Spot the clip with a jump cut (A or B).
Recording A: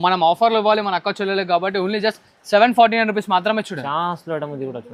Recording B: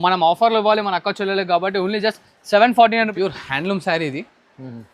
B